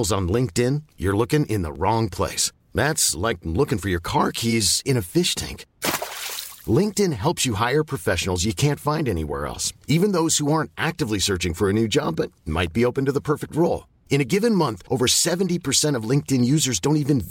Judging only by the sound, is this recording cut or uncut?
uncut